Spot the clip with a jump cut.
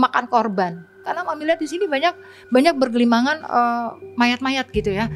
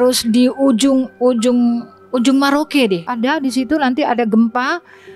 first; 1 cut; at 1.0 s

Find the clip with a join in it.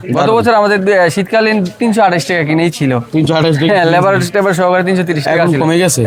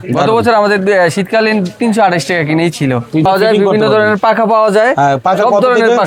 second; 1 cut; at 3.3 s

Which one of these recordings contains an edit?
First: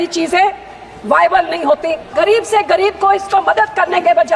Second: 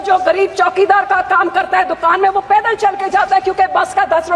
first; 1 cut; at 2.1 s

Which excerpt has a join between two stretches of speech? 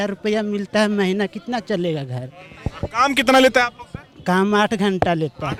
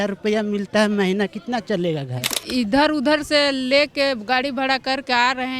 second; 1 cut; at 2.4 s

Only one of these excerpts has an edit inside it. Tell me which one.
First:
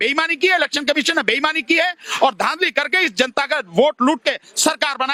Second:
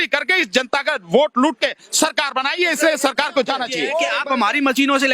second; 1 cut; at 4.1 s

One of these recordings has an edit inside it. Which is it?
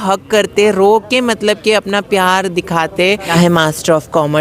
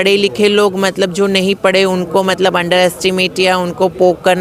first; 1 cut; at 3.3 s

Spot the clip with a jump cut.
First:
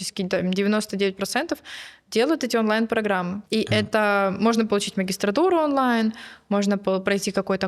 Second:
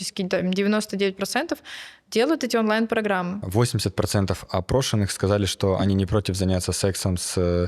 second; 1 cut; at 3.4 s

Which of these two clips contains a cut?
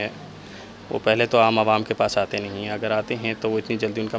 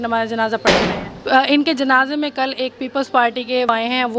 second; 1 cut; at 1.1 s

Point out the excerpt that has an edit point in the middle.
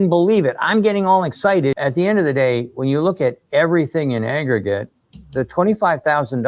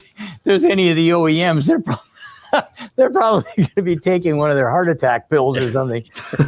first; 1 cut; at 1.8 s

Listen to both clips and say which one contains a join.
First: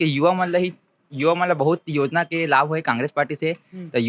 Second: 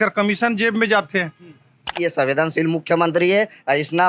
second; 1 cut; at 1.9 s

